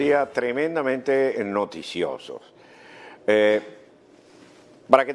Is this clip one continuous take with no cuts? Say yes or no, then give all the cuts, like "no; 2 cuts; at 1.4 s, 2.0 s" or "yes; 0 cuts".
no; 1 cut; at 0.9 s